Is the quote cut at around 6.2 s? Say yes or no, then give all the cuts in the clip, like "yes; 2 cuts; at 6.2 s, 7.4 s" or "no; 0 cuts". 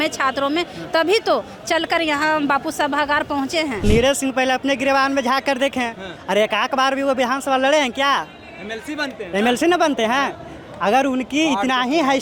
no; 1 cut; at 3.8 s